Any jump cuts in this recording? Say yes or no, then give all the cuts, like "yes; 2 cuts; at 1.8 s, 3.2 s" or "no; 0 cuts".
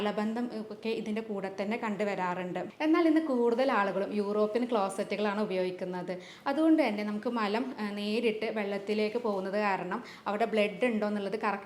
yes; 1 cut; at 2.7 s